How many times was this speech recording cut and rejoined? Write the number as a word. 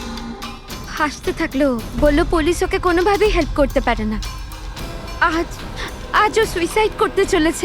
one